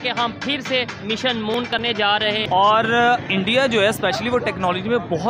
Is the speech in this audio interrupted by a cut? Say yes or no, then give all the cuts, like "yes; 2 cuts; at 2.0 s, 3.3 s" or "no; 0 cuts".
yes; 1 cut; at 2.4 s